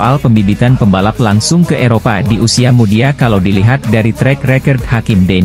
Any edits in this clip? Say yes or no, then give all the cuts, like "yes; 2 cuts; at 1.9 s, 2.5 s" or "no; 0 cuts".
no; 0 cuts